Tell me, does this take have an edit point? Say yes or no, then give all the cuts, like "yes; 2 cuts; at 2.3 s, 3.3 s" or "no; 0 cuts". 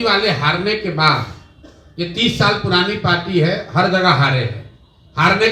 no; 0 cuts